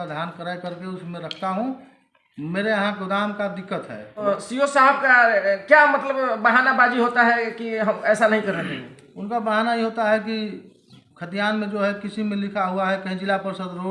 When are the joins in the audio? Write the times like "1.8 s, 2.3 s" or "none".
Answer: 4.2 s